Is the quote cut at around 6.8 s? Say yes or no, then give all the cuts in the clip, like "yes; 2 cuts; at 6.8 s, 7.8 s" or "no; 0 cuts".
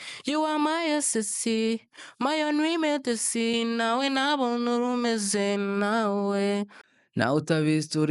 yes; 1 cut; at 6.8 s